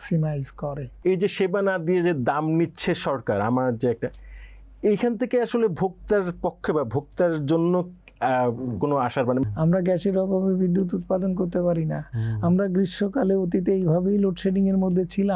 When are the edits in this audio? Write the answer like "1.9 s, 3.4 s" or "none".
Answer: 1.0 s, 9.4 s